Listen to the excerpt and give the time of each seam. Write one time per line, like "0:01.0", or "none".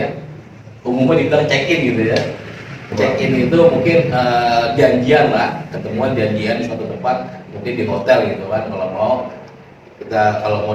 0:02.8